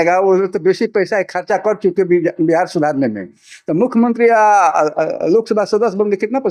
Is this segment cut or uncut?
uncut